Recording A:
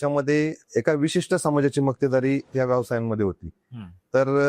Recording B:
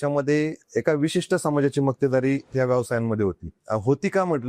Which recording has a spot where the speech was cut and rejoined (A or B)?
B